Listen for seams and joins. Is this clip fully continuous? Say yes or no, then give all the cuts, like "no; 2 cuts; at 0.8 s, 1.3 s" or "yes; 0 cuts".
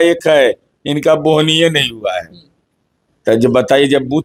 yes; 0 cuts